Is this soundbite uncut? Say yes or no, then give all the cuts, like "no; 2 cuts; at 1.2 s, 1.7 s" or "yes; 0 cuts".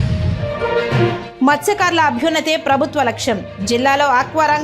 no; 1 cut; at 1.3 s